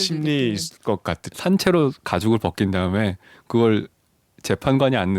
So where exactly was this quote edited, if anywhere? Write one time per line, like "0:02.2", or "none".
0:01.2